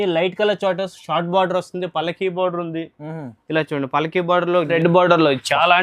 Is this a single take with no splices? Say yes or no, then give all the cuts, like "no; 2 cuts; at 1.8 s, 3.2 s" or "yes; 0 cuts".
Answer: no; 1 cut; at 4.7 s